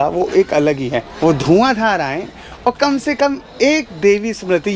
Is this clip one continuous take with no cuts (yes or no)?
no